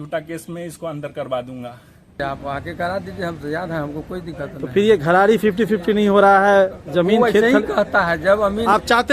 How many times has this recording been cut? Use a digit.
1